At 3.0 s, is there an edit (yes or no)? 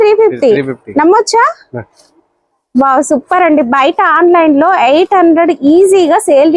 no